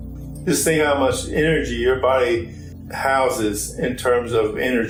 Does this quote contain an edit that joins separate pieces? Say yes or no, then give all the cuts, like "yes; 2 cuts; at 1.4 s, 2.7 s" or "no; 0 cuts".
no; 0 cuts